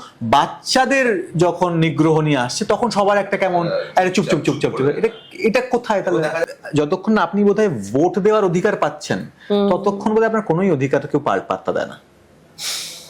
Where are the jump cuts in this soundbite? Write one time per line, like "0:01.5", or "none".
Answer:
0:06.4